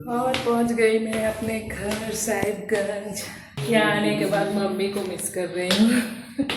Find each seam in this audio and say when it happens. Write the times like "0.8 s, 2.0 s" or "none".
3.6 s